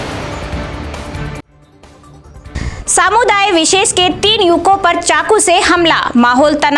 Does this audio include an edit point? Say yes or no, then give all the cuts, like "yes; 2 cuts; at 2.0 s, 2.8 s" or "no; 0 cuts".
no; 0 cuts